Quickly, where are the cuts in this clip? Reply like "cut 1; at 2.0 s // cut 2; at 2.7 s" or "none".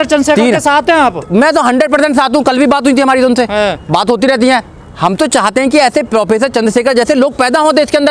none